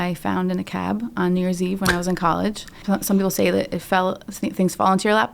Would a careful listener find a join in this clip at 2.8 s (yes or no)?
yes